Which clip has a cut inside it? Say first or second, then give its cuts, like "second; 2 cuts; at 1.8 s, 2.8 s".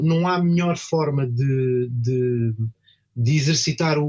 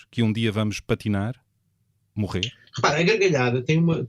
second; 1 cut; at 2.6 s